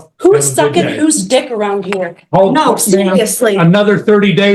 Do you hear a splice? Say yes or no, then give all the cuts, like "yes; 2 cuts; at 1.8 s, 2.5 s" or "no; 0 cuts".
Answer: no; 0 cuts